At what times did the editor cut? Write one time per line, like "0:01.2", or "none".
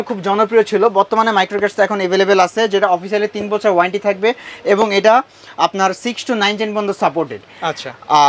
none